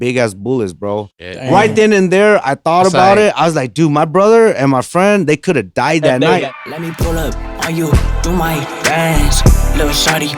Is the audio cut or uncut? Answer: cut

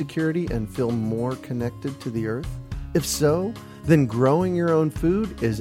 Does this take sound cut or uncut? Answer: uncut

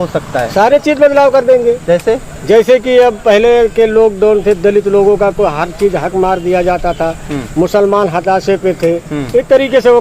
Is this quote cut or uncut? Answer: uncut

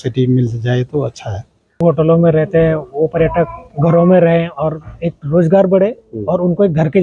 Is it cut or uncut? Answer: cut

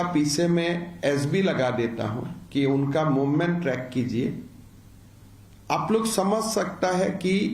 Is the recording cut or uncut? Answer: uncut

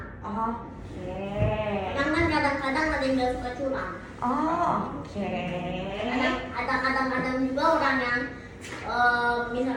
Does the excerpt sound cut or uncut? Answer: uncut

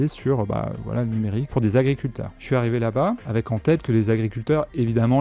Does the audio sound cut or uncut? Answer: cut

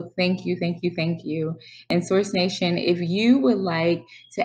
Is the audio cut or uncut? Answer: cut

